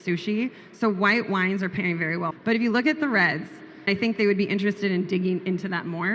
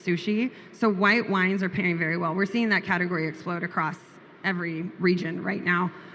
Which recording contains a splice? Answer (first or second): first